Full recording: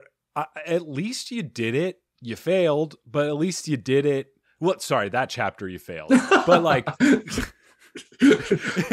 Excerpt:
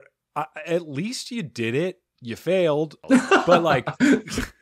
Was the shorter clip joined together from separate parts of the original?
yes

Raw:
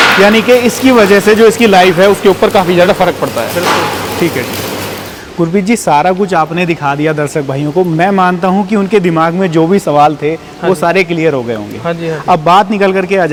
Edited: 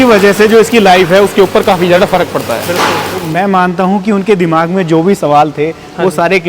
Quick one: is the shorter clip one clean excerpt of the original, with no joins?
no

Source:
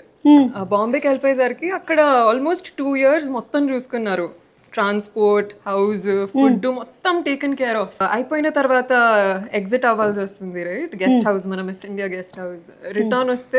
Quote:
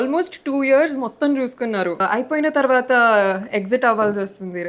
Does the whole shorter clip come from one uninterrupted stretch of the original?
no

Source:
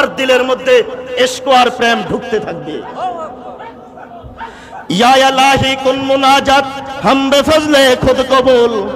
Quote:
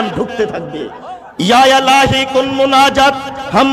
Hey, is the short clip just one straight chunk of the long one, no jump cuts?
no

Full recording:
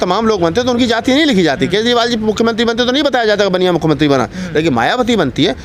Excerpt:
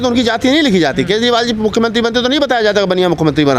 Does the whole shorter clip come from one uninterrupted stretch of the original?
yes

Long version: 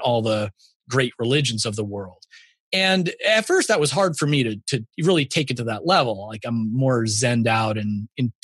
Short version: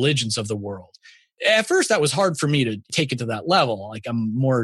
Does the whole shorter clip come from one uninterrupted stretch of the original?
no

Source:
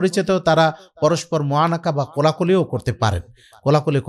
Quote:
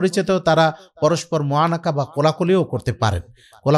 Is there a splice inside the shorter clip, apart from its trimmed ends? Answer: no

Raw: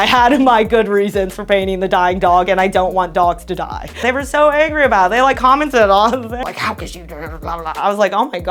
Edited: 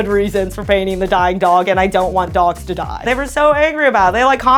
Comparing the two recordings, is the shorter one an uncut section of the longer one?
no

